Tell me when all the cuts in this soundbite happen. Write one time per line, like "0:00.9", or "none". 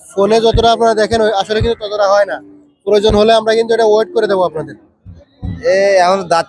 0:05.1